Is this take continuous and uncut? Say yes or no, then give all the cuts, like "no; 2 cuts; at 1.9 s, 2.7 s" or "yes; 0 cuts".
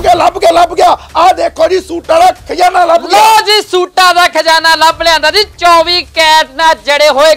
yes; 0 cuts